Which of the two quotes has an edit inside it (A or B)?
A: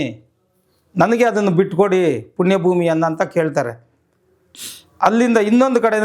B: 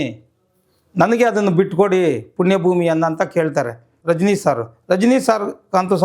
B